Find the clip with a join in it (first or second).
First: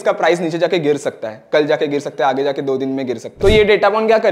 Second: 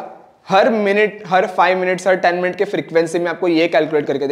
first